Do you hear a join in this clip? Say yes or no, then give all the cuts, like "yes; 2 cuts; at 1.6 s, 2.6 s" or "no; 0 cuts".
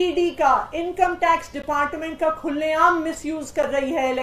no; 0 cuts